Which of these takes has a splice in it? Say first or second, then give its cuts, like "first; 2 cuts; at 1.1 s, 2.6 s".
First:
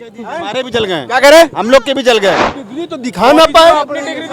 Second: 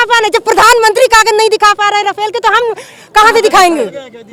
first; 1 cut; at 2.5 s